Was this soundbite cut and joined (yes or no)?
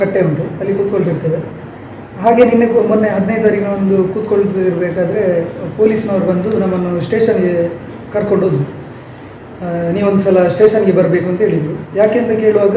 no